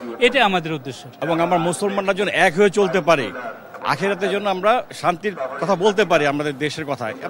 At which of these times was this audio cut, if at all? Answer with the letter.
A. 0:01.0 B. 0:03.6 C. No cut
A